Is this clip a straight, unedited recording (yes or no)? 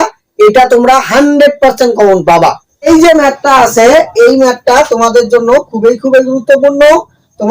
no